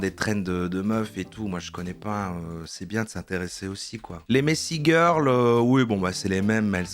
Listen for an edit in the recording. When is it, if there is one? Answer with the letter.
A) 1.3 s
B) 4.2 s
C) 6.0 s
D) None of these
B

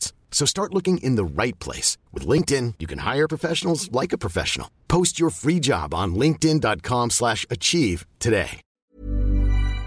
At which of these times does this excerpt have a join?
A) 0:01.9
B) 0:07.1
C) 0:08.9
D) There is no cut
C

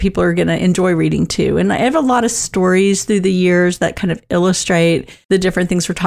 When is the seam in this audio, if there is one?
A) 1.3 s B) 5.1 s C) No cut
B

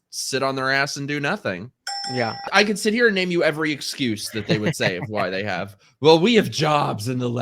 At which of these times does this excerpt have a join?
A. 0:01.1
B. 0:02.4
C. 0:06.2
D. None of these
B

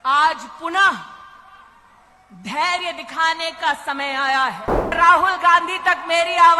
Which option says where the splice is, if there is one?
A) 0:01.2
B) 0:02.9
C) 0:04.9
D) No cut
C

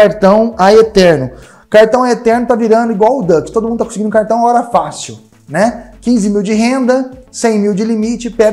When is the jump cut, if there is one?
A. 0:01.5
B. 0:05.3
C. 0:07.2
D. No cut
D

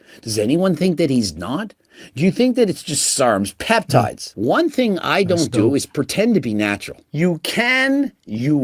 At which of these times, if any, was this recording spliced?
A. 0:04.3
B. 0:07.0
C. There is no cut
A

